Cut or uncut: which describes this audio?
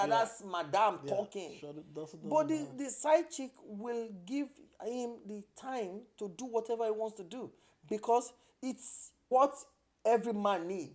cut